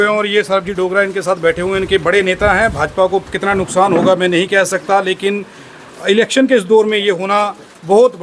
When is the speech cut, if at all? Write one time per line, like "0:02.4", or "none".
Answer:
none